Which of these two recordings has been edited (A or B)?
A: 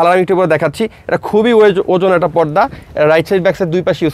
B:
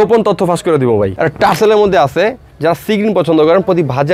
B